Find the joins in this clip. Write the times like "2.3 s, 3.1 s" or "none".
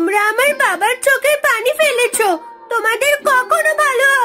none